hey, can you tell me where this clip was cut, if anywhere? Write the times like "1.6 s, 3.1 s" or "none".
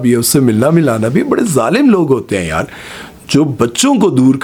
none